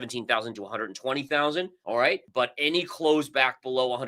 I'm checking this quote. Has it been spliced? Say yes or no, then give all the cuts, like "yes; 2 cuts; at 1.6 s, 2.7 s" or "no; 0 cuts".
yes; 1 cut; at 2.0 s